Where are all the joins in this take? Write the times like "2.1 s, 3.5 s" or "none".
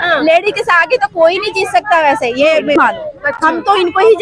2.8 s